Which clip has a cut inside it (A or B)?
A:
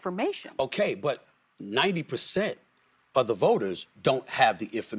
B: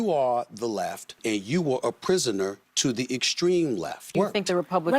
B